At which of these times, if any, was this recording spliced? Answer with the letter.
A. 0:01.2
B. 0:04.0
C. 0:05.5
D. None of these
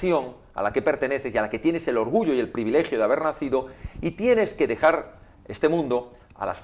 D